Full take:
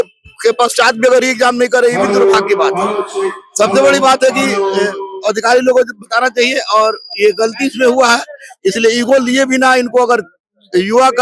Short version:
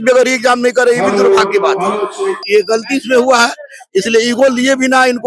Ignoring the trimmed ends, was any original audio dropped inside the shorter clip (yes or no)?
yes